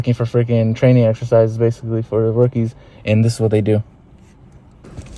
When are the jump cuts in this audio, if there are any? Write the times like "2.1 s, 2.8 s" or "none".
none